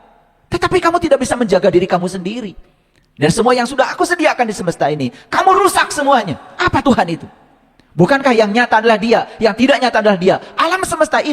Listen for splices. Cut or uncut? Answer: cut